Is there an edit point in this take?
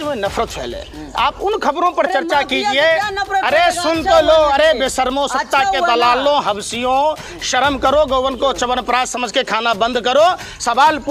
no; 0 cuts

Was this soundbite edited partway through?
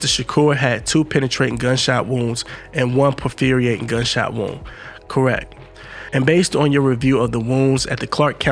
no; 0 cuts

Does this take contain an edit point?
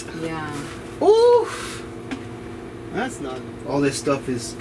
yes; 1 cut; at 3.2 s

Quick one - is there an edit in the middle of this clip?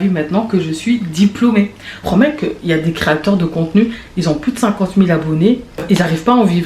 yes; 2 cuts; at 2.0 s, 5.8 s

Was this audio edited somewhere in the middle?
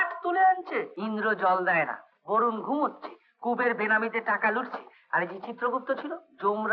yes; 1 cut; at 0.9 s

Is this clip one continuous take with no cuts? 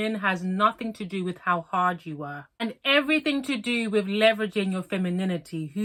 yes; 0 cuts

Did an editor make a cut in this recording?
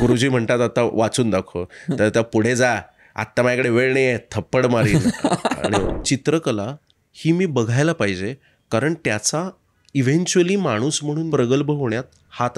yes; 2 cuts; at 6.0 s, 11.2 s

